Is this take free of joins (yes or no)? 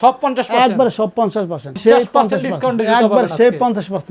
no